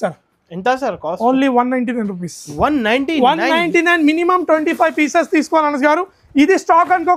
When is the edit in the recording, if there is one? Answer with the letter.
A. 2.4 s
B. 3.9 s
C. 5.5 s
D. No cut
D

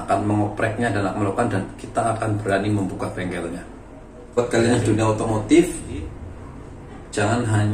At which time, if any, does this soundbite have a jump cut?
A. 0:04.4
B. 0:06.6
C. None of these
A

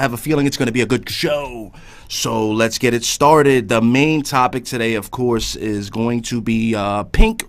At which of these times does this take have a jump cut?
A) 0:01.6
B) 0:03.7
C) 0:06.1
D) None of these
A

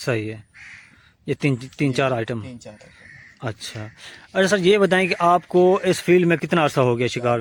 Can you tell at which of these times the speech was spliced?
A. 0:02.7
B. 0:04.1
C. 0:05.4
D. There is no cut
D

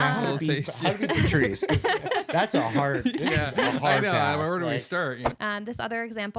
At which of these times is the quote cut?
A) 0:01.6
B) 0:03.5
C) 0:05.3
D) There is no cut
C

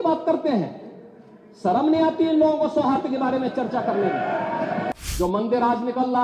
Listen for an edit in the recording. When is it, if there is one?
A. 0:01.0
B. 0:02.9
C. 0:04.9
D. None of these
C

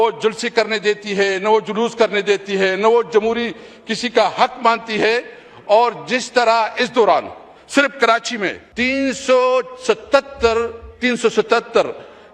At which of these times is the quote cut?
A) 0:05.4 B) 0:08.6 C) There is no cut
B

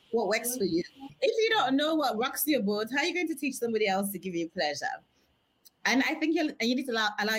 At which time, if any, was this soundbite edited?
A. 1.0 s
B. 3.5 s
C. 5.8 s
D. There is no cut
A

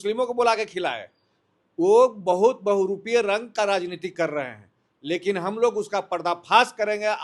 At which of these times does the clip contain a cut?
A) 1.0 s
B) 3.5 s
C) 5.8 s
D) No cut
D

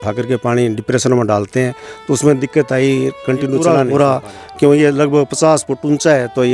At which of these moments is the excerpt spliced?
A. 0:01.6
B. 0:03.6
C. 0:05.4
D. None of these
B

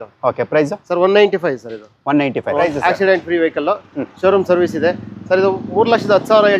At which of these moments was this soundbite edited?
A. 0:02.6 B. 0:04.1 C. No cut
A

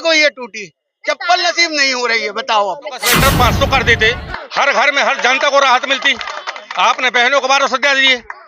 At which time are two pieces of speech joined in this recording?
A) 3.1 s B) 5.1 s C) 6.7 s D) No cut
A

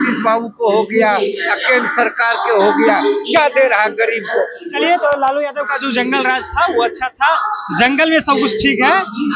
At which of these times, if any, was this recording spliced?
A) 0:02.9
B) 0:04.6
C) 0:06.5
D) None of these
D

